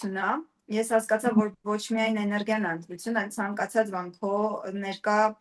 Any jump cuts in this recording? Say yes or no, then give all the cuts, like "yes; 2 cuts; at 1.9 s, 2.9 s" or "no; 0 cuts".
no; 0 cuts